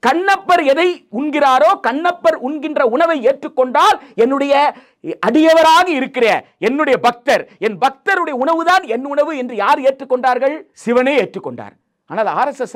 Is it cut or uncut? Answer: cut